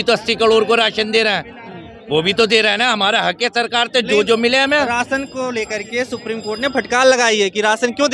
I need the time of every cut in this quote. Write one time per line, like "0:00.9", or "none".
none